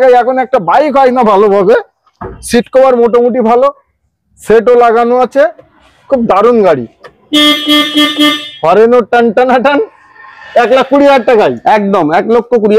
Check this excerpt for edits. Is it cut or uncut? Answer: uncut